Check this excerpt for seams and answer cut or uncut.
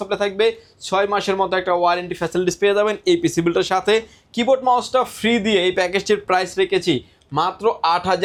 uncut